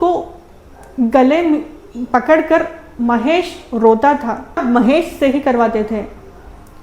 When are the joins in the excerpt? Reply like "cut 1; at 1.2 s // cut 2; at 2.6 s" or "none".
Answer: cut 1; at 4.6 s